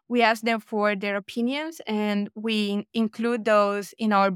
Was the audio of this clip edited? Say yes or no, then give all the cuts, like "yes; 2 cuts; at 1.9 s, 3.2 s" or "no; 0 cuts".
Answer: no; 0 cuts